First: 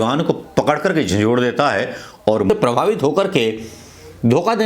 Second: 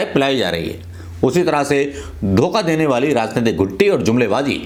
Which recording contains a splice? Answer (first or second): first